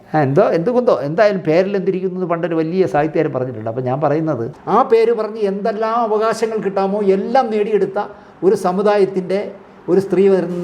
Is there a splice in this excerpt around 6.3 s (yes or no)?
no